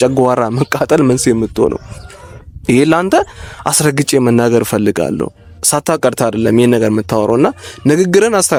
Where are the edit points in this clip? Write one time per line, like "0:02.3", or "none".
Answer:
none